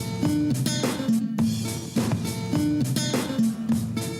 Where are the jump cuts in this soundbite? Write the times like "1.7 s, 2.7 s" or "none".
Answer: none